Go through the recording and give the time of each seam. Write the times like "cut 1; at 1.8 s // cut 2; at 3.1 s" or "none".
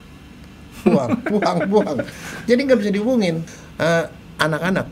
cut 1; at 3.5 s